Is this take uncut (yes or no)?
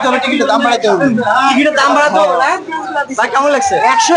yes